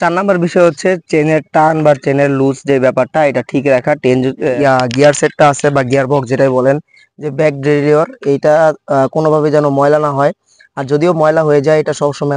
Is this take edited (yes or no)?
yes